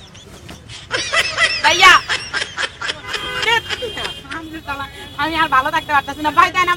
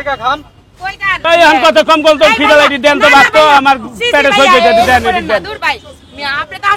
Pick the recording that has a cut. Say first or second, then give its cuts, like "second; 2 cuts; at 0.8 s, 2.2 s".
second; 1 cut; at 1.2 s